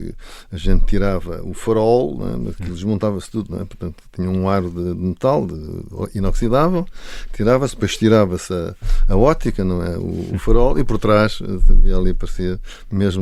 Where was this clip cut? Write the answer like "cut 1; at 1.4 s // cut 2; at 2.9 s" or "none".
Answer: none